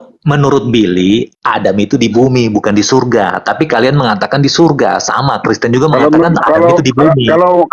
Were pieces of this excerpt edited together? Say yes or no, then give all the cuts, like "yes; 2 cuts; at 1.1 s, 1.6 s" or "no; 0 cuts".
yes; 1 cut; at 1.4 s